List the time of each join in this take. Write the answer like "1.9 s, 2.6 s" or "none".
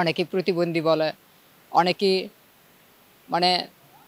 none